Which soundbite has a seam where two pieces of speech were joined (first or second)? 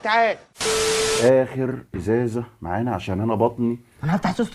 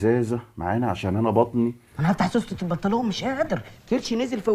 first